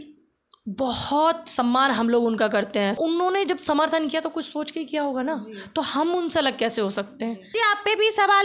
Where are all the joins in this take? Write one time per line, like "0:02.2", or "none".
0:03.0
0:07.5